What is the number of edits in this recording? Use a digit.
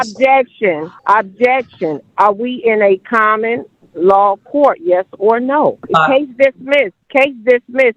3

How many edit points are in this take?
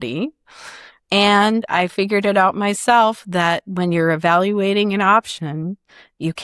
1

